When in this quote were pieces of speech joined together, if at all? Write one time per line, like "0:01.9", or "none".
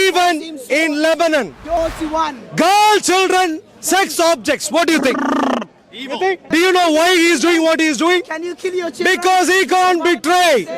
0:01.8
0:06.5